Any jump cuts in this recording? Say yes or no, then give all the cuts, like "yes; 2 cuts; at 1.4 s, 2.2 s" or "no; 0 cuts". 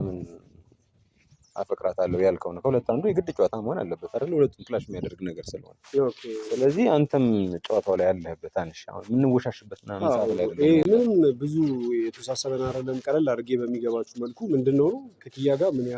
no; 0 cuts